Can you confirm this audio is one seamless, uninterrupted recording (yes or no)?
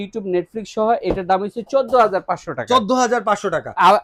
yes